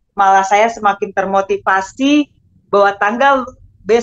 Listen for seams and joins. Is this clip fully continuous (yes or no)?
yes